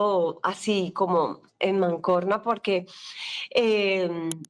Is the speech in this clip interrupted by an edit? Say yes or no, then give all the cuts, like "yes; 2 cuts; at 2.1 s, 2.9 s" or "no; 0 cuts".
no; 0 cuts